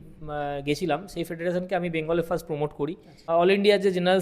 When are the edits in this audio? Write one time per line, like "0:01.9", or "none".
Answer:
0:03.3